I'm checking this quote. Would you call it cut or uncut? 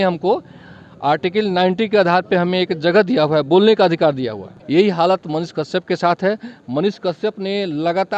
cut